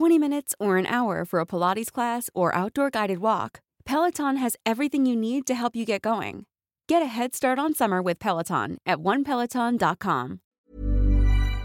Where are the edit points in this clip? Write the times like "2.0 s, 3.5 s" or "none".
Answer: 10.4 s